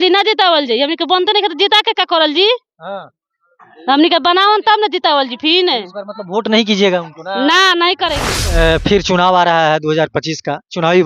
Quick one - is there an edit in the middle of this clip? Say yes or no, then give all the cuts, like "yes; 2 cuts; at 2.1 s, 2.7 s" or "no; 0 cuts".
yes; 1 cut; at 8.3 s